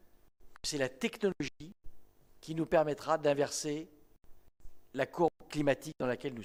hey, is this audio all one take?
yes; 0 cuts

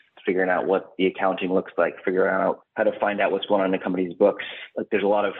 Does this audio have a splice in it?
yes; 1 cut; at 2.7 s

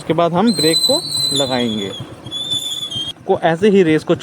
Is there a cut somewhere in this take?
yes; 1 cut; at 3.2 s

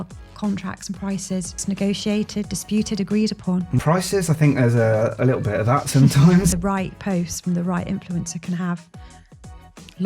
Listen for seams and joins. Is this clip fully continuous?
no; 3 cuts; at 1.6 s, 3.8 s, 6.5 s

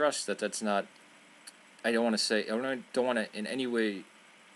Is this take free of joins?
yes; 0 cuts

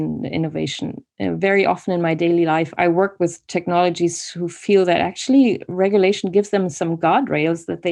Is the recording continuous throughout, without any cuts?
no; 1 cut; at 2.7 s

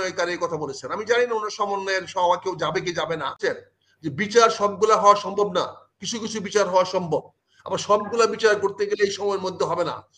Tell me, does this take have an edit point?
yes; 1 cut; at 3.4 s

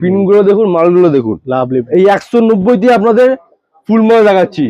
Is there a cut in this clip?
yes; 1 cut; at 1.9 s

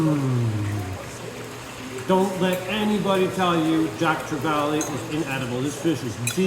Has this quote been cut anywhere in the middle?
yes; 1 cut; at 1.2 s

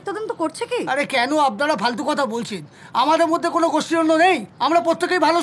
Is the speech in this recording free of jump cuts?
yes; 0 cuts

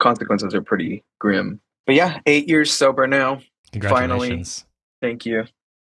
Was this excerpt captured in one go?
no; 1 cut; at 1.7 s

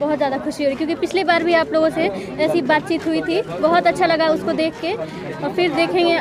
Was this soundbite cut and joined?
no; 0 cuts

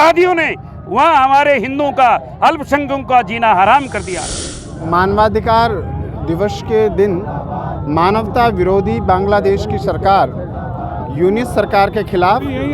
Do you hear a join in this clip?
no; 0 cuts

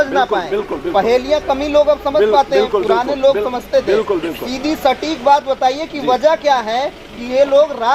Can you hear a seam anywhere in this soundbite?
no; 0 cuts

